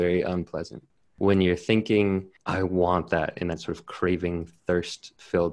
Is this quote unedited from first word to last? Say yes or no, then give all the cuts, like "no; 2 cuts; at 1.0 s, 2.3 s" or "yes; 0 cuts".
no; 2 cuts; at 1.1 s, 2.4 s